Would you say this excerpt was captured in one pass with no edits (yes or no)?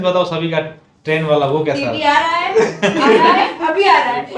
yes